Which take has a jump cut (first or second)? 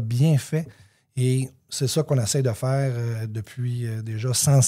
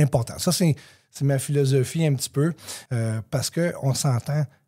second